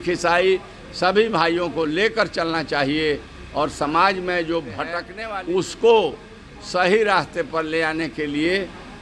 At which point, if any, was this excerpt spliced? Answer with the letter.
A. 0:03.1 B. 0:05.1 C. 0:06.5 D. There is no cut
B